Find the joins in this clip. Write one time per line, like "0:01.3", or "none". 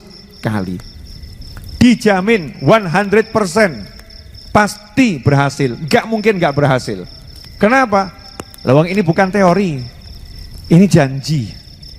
none